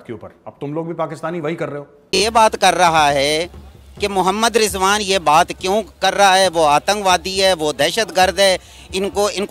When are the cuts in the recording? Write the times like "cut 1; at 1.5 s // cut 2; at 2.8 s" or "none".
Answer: cut 1; at 1.8 s